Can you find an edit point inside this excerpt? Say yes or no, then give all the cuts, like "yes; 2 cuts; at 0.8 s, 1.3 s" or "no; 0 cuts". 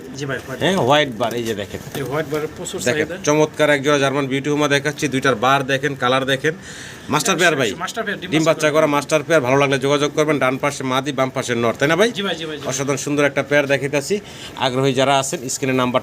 no; 0 cuts